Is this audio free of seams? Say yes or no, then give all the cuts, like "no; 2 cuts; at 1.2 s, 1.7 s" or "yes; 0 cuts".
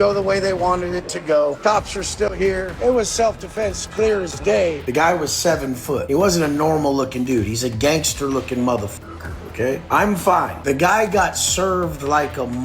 no; 5 cuts; at 1.6 s, 2.8 s, 4.8 s, 6.0 s, 10.5 s